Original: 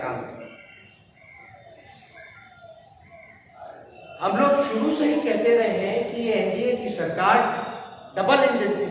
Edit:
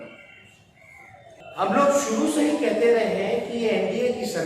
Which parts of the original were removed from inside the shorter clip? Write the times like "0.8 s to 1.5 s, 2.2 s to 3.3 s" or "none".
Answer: 1.8 s to 4.0 s